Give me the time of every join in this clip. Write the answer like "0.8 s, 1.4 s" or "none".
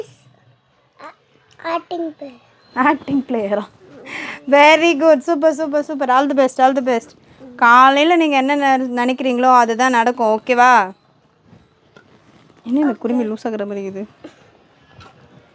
none